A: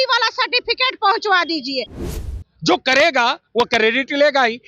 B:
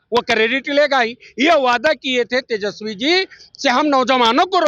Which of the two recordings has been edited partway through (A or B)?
A